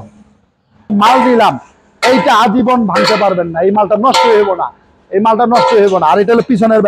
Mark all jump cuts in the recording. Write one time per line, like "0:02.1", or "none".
0:00.9